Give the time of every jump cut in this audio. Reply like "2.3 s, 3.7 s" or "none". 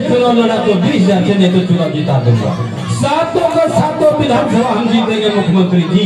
none